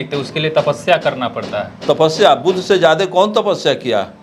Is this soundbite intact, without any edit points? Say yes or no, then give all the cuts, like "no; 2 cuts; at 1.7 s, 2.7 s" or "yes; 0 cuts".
yes; 0 cuts